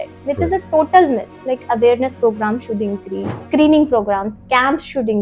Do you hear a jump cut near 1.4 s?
yes; 2 cuts; at 1.4 s, 3.3 s

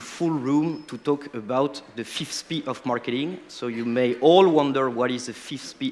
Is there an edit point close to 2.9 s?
yes; 1 cut; at 2.9 s

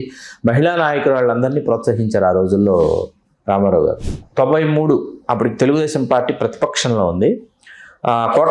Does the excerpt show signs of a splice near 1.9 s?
no; 1 cut; at 4.0 s

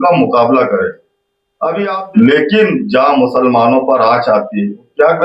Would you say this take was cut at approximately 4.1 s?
no; 1 cut; at 1.9 s

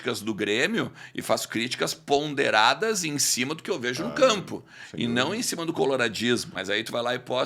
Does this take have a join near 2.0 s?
no; 1 cut; at 6.5 s

